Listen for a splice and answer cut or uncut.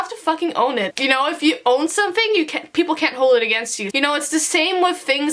cut